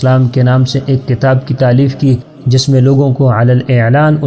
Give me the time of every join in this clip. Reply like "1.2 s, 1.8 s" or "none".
2.3 s